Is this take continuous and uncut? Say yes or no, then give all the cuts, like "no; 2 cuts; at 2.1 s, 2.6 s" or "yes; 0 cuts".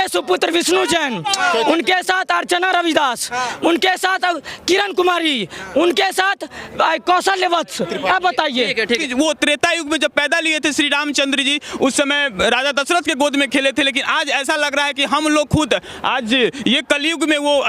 no; 1 cut; at 9.0 s